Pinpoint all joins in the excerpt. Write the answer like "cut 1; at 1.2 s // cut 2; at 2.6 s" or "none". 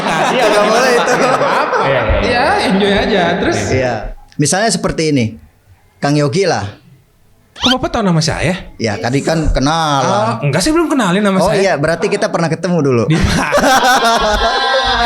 cut 1; at 4.0 s